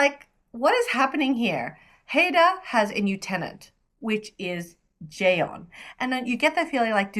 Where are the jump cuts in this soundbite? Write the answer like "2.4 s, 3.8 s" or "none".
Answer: none